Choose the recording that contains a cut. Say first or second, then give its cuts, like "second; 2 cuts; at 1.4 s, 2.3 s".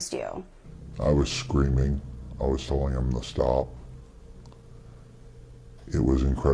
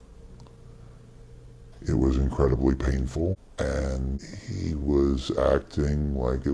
second; 2 cuts; at 3.5 s, 4.2 s